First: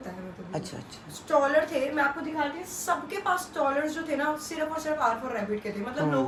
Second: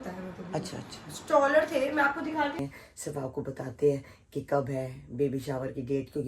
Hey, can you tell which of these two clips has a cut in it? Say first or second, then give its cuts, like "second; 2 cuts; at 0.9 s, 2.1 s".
second; 1 cut; at 2.6 s